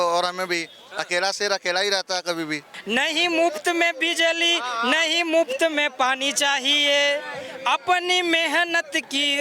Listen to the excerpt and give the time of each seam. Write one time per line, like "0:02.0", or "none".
0:02.7